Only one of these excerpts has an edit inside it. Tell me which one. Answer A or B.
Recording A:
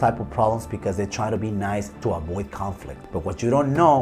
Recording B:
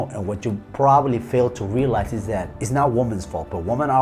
A